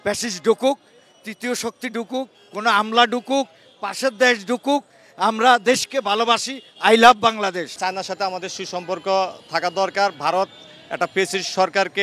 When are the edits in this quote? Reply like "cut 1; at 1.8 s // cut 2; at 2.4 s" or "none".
cut 1; at 7.7 s

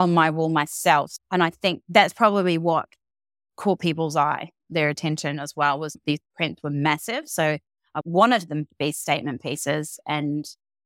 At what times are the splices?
none

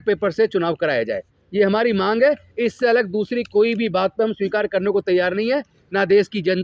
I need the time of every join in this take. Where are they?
none

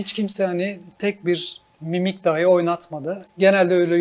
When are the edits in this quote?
none

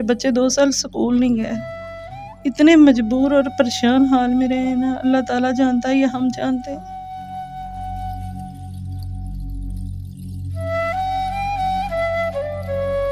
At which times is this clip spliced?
none

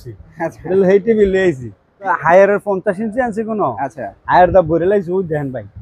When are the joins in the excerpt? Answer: cut 1; at 2.2 s

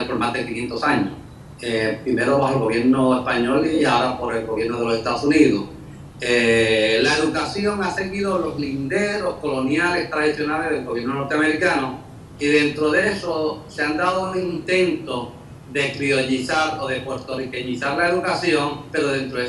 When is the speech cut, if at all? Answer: cut 1; at 2.2 s

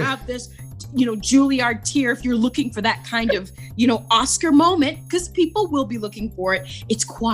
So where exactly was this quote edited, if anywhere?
none

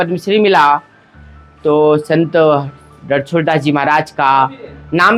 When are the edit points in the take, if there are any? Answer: none

